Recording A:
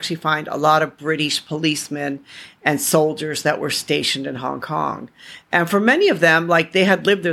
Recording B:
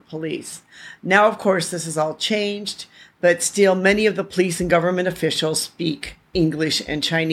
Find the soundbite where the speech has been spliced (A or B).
B